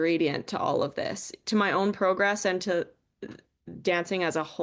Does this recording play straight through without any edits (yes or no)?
yes